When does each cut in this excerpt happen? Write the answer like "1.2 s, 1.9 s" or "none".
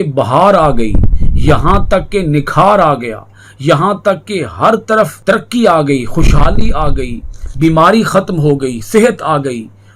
5.2 s